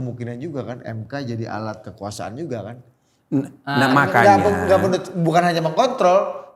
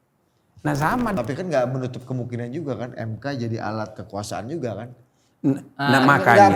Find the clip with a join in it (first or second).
second